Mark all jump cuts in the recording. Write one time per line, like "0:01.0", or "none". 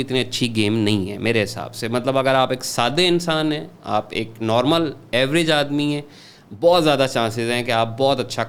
none